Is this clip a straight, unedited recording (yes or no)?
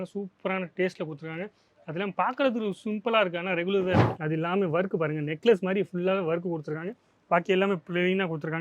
no